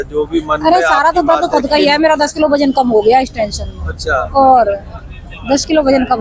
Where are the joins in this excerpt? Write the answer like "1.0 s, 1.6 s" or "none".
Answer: none